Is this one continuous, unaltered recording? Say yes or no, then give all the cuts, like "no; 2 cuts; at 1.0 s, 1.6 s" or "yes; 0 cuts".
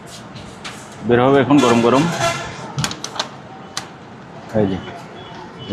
yes; 0 cuts